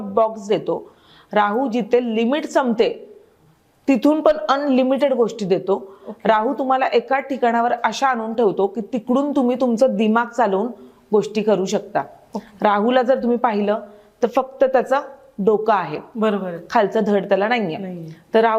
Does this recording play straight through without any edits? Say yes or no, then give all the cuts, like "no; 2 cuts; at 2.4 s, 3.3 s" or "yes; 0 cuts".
yes; 0 cuts